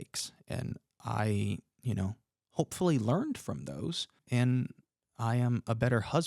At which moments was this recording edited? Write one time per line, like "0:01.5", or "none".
0:04.2